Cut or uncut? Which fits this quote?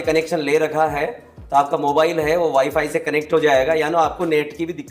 uncut